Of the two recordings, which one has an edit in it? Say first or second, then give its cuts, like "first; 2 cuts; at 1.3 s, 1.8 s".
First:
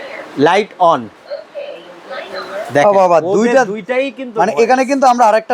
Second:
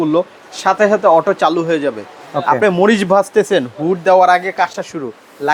first; 1 cut; at 1.2 s